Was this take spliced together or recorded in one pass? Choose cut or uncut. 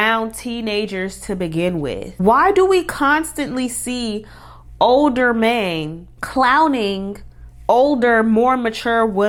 uncut